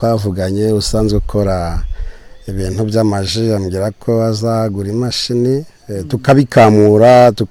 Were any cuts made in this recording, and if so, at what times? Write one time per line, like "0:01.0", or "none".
none